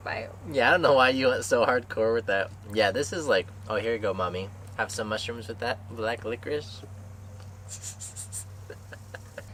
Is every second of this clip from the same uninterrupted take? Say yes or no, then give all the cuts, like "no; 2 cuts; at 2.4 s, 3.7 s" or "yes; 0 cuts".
yes; 0 cuts